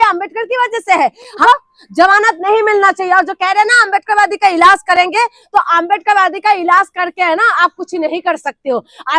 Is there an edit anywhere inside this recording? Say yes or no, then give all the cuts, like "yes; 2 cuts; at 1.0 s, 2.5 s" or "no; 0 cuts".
yes; 1 cut; at 1.4 s